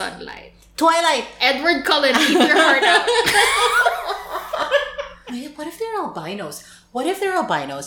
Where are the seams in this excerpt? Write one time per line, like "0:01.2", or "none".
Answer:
0:05.2